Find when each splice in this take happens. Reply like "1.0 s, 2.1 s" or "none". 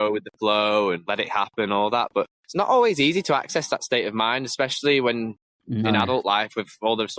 none